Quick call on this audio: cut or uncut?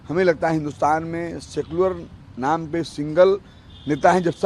uncut